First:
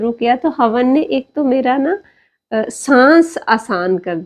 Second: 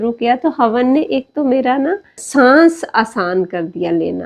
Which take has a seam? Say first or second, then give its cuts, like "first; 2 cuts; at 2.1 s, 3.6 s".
second; 1 cut; at 2.2 s